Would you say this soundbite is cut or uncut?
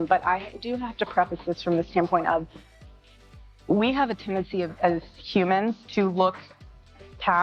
uncut